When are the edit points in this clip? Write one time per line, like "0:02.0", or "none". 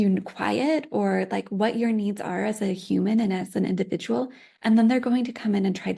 none